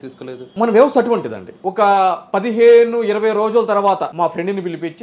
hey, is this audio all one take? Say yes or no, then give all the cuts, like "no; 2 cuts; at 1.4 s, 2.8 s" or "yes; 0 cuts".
yes; 0 cuts